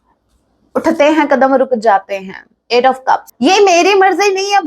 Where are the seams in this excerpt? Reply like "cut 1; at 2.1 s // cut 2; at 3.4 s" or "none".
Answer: cut 1; at 3.3 s